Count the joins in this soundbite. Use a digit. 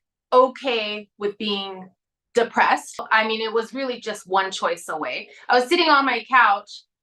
1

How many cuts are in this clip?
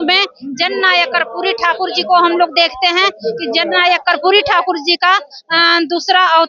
0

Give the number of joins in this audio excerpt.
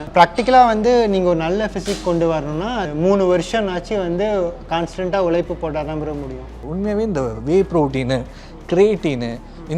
2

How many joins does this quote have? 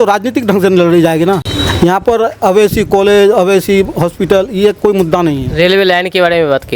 1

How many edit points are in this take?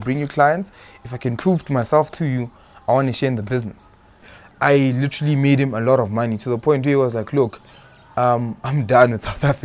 1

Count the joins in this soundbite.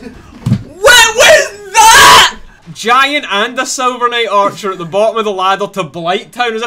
1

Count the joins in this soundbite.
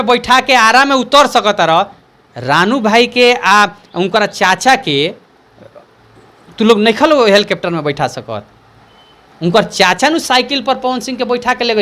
0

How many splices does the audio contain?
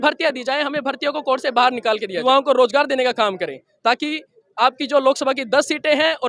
1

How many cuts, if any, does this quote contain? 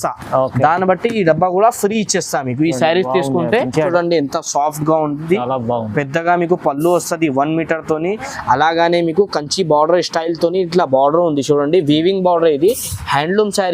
1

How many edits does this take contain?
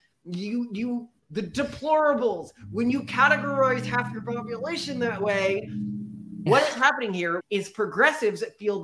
2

